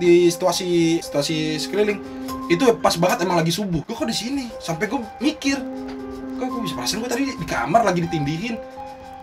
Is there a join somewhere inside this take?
yes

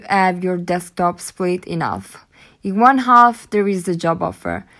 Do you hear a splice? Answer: no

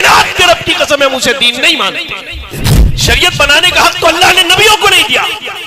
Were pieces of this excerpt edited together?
yes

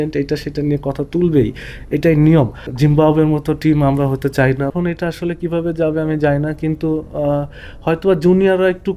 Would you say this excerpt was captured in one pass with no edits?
no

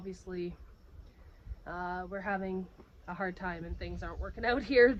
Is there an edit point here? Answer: no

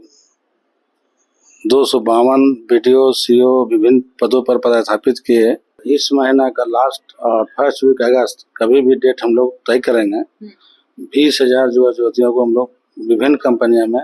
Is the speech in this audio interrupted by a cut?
yes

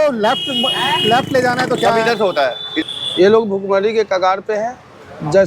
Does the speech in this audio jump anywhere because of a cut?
yes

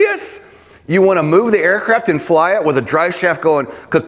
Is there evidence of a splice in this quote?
no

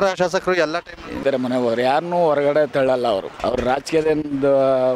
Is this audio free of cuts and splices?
no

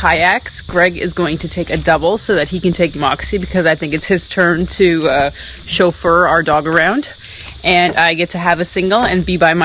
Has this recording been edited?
no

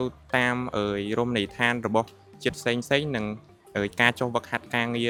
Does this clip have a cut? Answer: no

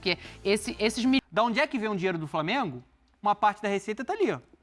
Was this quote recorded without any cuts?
no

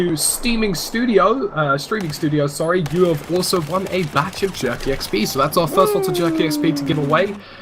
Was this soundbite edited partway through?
yes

